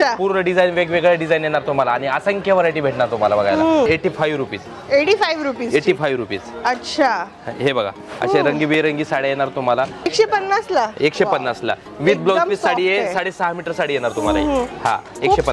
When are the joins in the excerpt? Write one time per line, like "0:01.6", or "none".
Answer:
0:03.9
0:10.1